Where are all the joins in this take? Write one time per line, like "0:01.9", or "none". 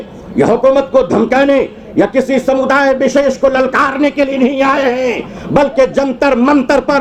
none